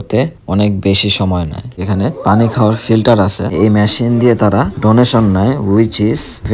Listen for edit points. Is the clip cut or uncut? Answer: cut